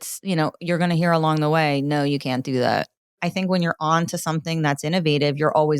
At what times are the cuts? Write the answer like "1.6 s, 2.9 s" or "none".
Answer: 3.1 s